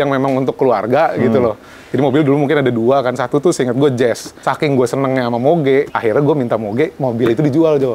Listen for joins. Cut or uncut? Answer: cut